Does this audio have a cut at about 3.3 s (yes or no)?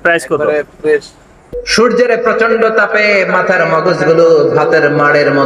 no